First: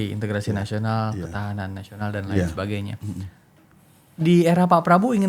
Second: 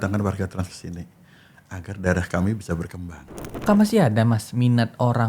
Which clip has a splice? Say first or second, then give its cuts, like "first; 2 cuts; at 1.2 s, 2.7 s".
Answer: second; 1 cut; at 3.7 s